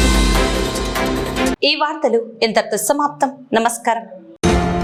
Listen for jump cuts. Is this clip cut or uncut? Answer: uncut